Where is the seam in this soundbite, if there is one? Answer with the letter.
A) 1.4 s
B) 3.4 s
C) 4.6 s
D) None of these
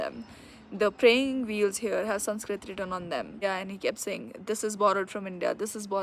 B